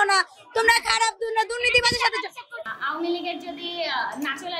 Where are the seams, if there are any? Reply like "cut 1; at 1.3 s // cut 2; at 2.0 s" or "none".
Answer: cut 1; at 2.5 s